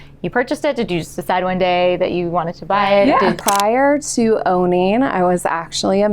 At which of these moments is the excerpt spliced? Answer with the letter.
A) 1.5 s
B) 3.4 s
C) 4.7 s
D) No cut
B